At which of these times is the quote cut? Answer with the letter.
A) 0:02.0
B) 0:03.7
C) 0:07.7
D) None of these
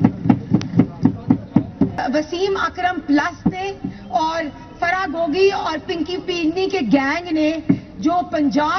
A